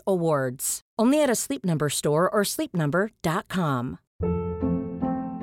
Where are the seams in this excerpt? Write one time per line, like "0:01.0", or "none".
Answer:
0:04.0